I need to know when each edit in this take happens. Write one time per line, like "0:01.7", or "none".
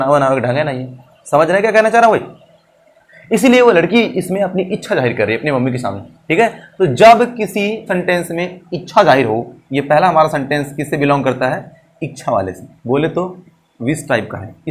none